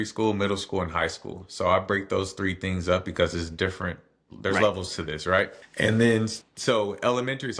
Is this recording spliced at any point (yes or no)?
yes